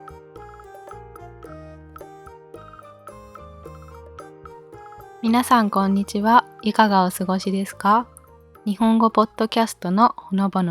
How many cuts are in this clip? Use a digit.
1